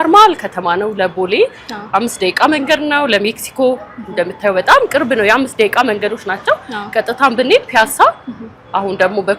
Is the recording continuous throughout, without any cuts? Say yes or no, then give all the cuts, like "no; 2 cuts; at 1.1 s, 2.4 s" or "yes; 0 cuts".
yes; 0 cuts